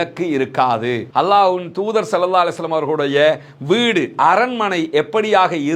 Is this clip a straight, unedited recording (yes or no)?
no